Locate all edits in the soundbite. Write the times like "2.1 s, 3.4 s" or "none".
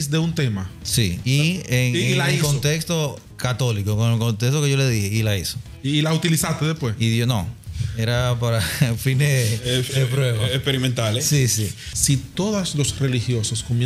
11.8 s